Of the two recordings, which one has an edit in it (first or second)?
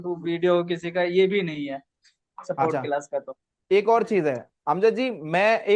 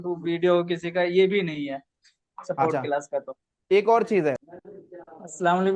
second